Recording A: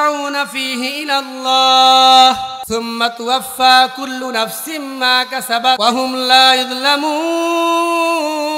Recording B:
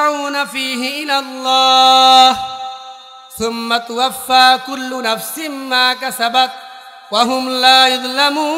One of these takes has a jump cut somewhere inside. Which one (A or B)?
A